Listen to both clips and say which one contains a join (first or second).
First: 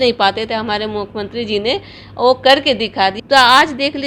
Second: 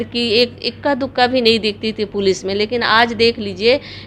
first